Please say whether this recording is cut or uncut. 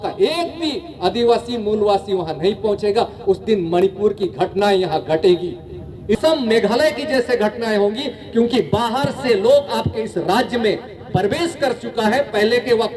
cut